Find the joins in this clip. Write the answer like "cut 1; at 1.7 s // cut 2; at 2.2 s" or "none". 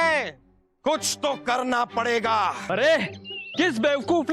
cut 1; at 2.6 s